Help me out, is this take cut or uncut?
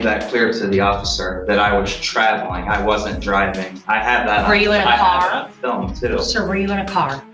uncut